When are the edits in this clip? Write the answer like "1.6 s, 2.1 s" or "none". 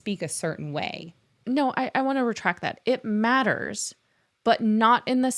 1.4 s